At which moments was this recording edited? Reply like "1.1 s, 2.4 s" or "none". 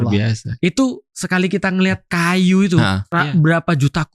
2.0 s, 3.0 s